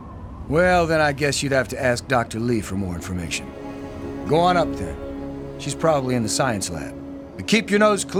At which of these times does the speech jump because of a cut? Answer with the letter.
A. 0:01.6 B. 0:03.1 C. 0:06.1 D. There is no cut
D